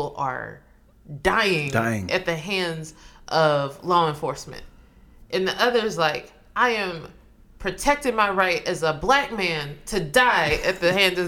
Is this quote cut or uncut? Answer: uncut